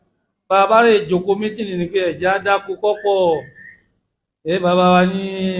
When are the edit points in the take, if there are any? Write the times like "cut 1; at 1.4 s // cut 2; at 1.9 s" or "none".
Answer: none